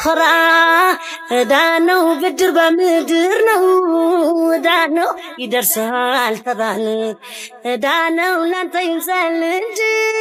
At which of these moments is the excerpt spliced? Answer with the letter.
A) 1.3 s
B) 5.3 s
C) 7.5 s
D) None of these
D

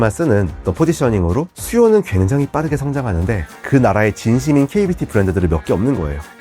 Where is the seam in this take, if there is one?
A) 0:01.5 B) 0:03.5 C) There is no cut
A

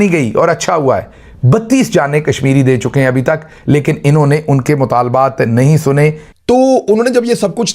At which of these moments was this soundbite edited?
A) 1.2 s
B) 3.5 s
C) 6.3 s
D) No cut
C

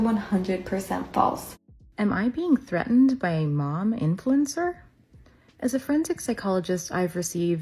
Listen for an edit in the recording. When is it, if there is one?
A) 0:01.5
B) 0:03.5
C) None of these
A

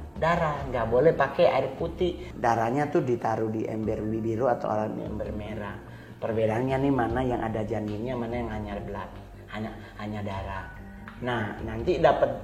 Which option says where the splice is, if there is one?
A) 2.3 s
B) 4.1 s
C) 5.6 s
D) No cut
A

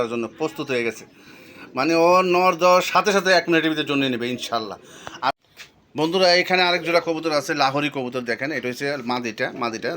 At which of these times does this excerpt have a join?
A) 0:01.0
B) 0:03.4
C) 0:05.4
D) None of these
C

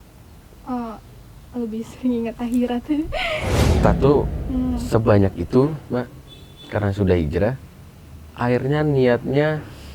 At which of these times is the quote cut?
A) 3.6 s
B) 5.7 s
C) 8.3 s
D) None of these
A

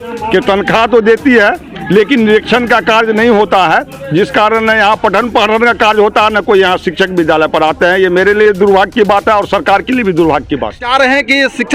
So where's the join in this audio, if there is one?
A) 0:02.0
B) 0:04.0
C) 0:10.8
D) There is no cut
C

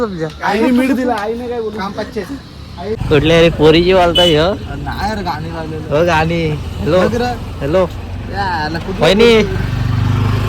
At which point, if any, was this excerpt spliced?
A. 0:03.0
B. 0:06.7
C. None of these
A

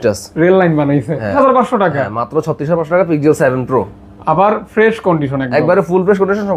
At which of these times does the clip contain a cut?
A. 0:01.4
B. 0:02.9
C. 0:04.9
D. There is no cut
A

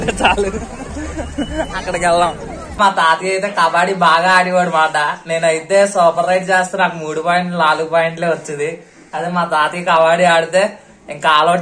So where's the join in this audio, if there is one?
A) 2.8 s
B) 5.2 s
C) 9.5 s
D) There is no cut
A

